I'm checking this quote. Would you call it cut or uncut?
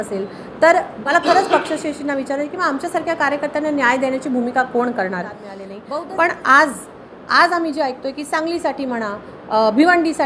cut